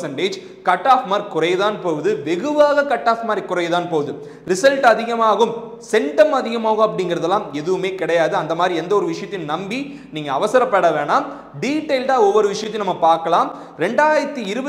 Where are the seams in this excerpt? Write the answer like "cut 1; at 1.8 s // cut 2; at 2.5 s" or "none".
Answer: none